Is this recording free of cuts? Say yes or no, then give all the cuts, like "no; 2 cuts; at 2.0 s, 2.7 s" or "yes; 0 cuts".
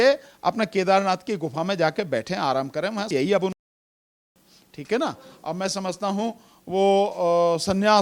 yes; 0 cuts